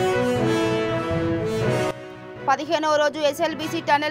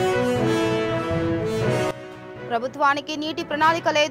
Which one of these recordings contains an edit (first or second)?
second